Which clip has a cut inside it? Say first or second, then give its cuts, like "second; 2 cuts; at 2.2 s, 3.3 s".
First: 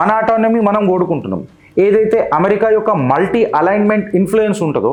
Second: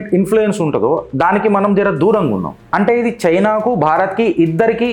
second; 1 cut; at 2.6 s